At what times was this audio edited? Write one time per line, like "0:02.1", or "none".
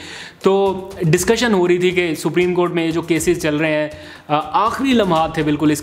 none